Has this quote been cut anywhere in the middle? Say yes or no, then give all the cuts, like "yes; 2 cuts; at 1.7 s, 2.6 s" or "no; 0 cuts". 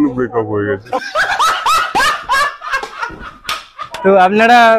no; 0 cuts